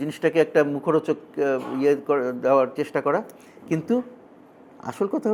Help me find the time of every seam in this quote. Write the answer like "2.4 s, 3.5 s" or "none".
none

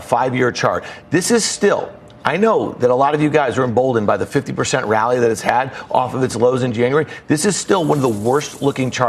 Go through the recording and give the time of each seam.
none

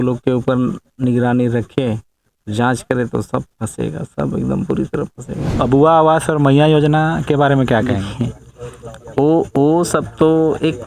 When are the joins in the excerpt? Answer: 5.5 s

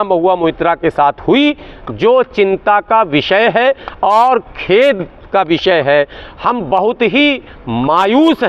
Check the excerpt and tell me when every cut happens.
none

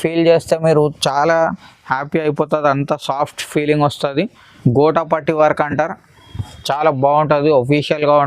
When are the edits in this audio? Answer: 4.4 s

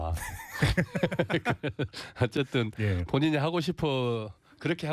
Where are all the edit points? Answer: 2.7 s

